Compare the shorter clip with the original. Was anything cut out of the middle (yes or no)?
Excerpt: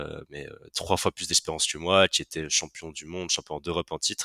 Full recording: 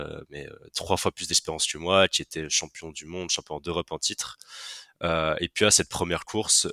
no